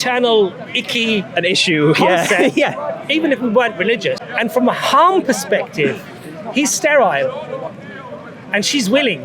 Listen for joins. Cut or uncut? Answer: cut